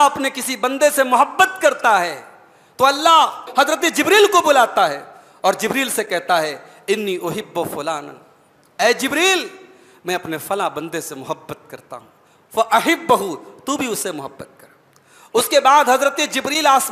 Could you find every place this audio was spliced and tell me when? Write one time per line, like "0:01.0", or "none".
0:03.5